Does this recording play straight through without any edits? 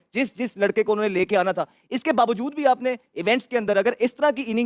yes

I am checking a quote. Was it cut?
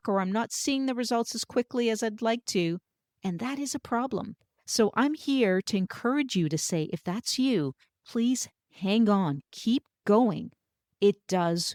no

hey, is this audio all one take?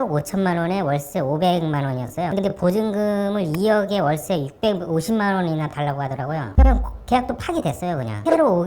no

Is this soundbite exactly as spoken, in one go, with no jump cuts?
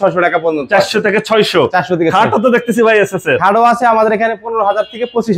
yes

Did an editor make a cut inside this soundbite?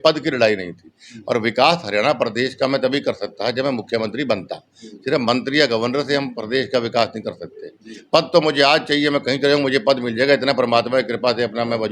no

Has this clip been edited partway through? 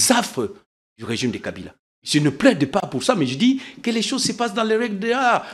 no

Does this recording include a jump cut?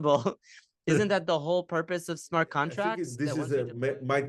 yes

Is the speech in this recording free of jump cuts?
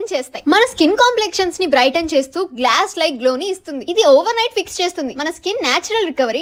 yes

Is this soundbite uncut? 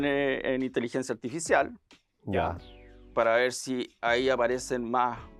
yes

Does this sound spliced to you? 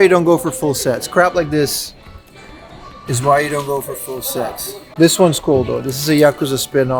no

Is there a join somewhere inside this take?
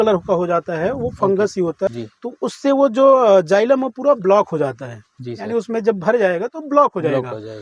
yes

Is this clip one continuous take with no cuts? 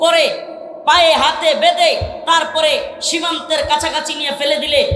yes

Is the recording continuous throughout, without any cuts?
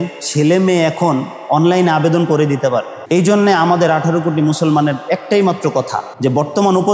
no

